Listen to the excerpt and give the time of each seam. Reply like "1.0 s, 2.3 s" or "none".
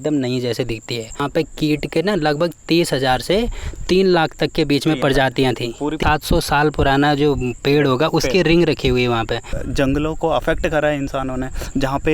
1.2 s, 6.0 s, 9.5 s